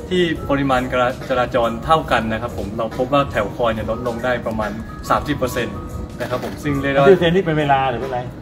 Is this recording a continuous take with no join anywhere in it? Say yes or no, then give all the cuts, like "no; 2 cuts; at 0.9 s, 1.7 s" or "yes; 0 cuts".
yes; 0 cuts